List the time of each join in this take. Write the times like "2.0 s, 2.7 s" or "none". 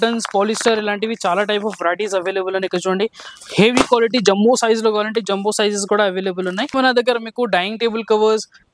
6.7 s